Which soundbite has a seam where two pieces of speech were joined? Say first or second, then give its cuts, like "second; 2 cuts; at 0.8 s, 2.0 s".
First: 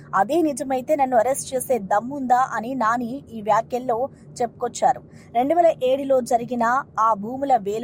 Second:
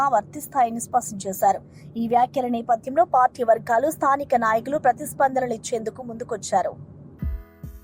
second; 1 cut; at 6.9 s